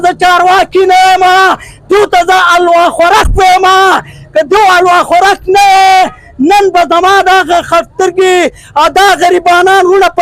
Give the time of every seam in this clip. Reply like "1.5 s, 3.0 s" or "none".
none